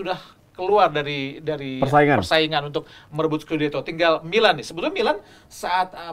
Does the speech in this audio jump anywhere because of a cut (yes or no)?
no